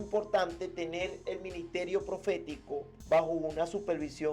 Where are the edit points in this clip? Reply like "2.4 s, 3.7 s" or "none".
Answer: 2.9 s

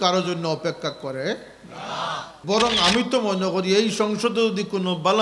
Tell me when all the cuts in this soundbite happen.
2.3 s

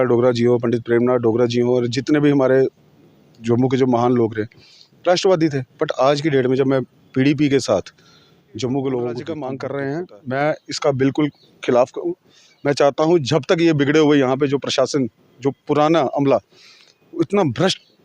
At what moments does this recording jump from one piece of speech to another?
9.5 s

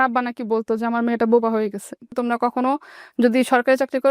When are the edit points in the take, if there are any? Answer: 2.1 s

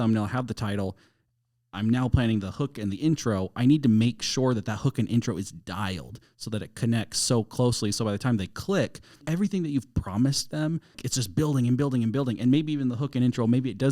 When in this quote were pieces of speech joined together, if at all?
9.2 s, 11.0 s

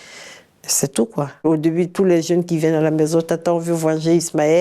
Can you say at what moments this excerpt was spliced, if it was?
1.4 s

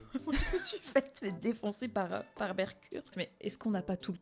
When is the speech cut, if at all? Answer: 3.2 s

